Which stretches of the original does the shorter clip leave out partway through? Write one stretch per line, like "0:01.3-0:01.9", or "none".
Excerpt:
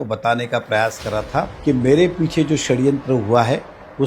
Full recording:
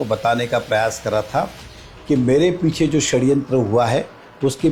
0:01.5-0:02.0